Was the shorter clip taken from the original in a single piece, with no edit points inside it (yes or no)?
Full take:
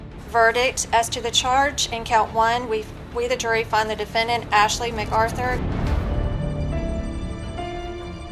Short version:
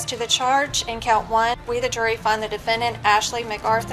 no